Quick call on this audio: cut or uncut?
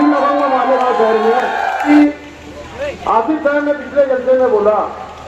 cut